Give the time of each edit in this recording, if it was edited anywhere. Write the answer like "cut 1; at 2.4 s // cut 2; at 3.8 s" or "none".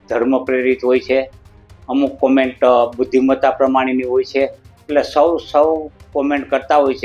none